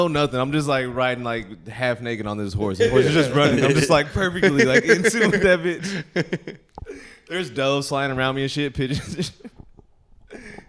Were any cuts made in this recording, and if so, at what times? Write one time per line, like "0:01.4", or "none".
none